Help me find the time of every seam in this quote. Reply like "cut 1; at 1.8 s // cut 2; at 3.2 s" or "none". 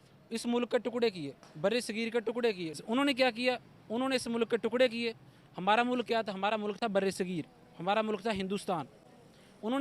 cut 1; at 2.8 s